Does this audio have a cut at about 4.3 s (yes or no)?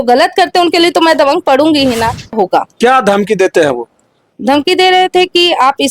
no